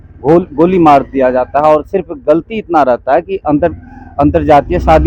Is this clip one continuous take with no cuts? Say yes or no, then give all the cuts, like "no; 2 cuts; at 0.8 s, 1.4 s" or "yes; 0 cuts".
yes; 0 cuts